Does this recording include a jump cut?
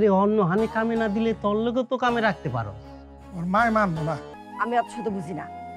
yes; 1 cut; at 4.4 s

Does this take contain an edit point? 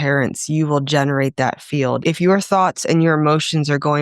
yes; 1 cut; at 2.0 s

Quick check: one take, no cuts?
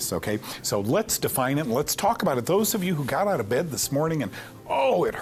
yes; 0 cuts

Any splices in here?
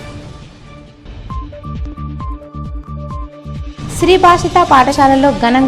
yes; 1 cut; at 2.5 s

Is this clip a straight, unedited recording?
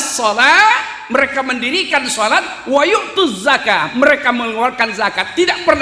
yes; 0 cuts

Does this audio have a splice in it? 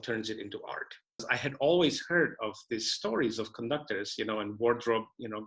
yes; 1 cut; at 1.3 s

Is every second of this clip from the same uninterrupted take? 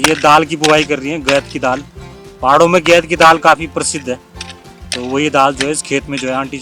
yes; 0 cuts

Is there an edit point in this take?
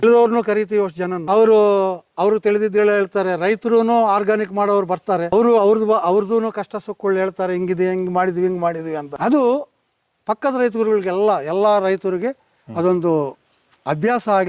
yes; 3 cuts; at 1.1 s, 5.3 s, 9.1 s

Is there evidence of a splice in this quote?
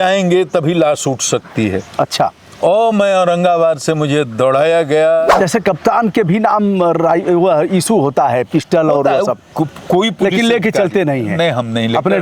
yes; 1 cut; at 5.3 s

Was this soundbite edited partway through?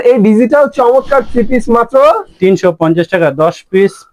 no; 0 cuts

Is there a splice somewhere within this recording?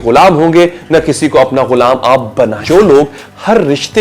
yes; 1 cut; at 2.6 s

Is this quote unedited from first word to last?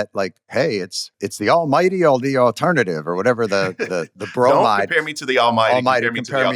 no; 2 cuts; at 1.1 s, 4.8 s

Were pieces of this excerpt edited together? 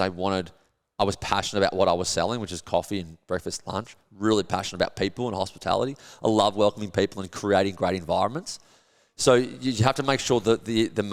no; 0 cuts

